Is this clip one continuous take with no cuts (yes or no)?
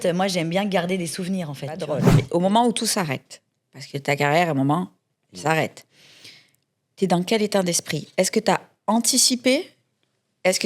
no